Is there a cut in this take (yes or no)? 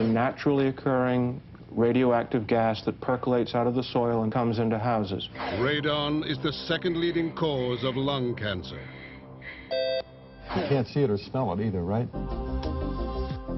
no